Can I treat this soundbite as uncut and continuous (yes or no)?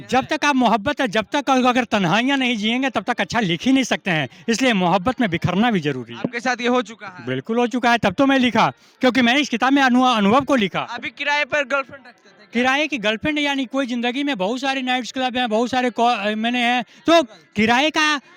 yes